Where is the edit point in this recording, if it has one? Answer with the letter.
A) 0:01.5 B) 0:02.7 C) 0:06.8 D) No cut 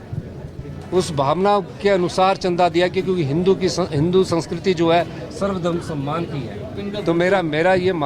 C